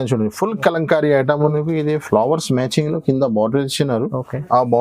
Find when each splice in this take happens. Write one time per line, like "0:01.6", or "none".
0:01.5